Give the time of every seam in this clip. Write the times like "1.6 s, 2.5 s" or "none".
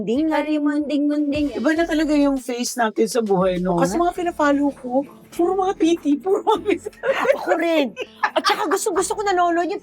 1.5 s, 3.9 s, 5.7 s